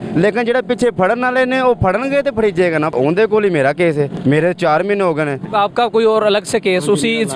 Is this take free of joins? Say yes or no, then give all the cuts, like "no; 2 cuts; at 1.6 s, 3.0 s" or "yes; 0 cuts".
no; 3 cuts; at 2.9 s, 4.1 s, 5.4 s